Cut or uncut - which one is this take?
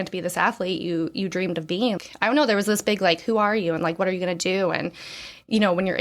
cut